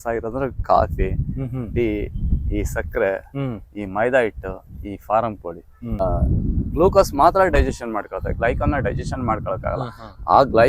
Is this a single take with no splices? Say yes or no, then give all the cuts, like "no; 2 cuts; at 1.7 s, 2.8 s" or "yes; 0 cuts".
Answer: no; 1 cut; at 6.0 s